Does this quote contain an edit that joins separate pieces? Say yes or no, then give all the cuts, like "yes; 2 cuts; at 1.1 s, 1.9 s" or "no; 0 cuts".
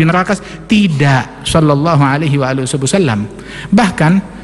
no; 0 cuts